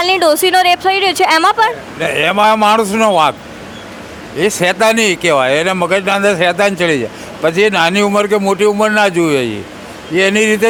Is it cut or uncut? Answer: uncut